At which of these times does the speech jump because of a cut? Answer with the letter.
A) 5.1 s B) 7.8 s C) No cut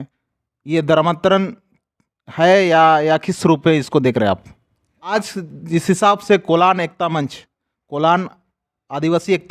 A